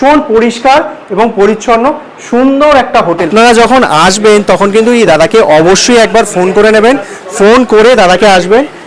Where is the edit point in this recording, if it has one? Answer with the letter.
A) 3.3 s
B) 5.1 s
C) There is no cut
A